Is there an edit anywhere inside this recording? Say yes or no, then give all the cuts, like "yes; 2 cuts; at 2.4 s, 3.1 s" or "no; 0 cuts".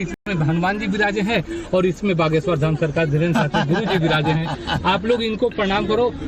no; 0 cuts